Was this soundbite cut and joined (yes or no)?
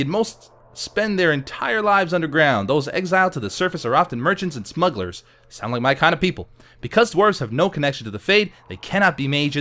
yes